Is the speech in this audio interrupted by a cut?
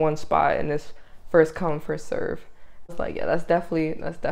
yes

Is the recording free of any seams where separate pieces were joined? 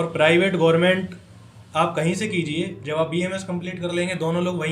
yes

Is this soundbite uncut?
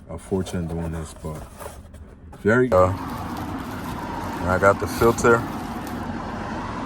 no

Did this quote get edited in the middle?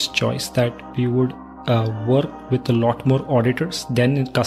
no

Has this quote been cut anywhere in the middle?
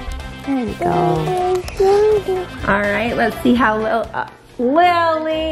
yes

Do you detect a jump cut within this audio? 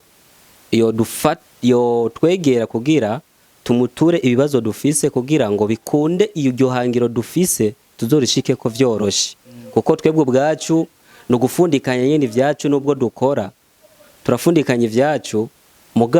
no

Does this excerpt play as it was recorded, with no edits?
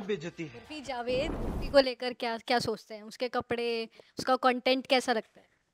no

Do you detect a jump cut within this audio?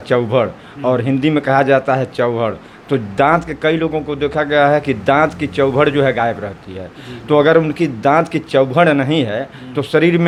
no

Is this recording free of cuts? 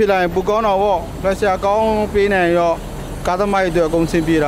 yes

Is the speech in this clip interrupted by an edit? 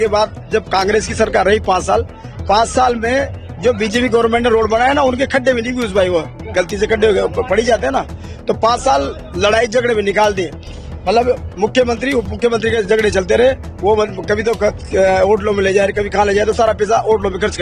no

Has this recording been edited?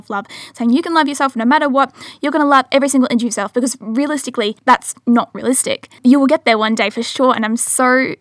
yes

